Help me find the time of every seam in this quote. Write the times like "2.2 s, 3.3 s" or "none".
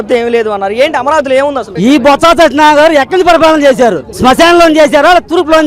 1.7 s